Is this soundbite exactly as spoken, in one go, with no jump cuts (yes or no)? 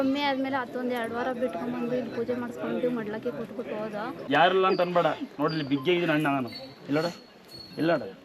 no